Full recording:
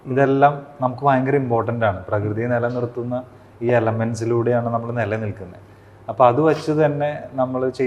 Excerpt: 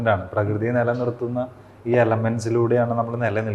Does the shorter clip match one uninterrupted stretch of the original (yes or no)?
yes